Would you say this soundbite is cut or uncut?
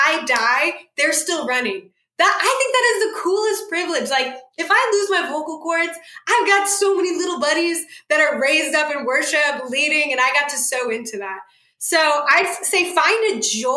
uncut